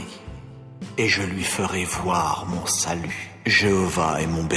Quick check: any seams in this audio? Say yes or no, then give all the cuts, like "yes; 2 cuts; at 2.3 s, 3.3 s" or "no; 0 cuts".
yes; 1 cut; at 3.2 s